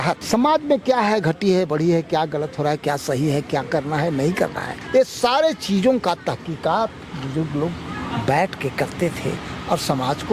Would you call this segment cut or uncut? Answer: uncut